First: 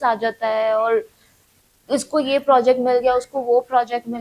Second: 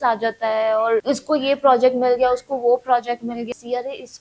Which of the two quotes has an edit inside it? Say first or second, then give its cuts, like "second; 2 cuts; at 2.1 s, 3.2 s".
second; 2 cuts; at 1.0 s, 3.5 s